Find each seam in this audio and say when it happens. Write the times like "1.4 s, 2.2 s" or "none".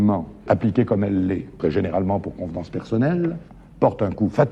none